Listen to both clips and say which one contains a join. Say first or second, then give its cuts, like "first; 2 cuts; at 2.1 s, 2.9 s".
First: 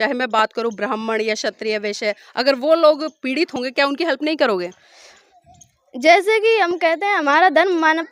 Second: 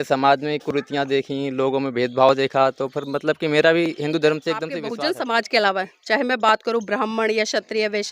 second; 1 cut; at 4.8 s